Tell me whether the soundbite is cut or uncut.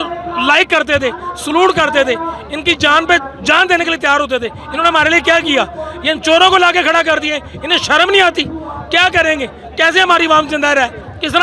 uncut